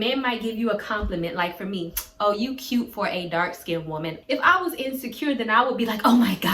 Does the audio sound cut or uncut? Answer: cut